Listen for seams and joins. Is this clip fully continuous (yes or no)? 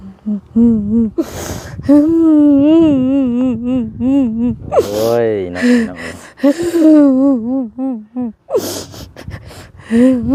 yes